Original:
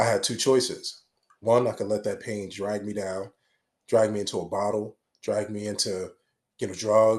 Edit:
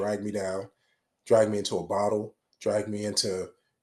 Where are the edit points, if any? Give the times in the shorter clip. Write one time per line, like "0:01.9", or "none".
none